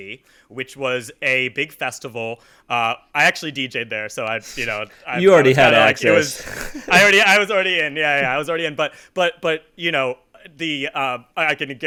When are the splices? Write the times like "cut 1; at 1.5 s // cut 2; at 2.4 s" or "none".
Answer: none